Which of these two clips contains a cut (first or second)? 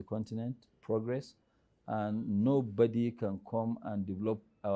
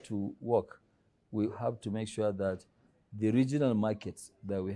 second